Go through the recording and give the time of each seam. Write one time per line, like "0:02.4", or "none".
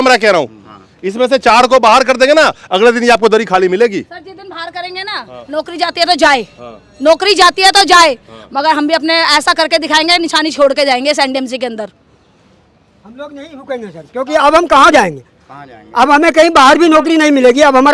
none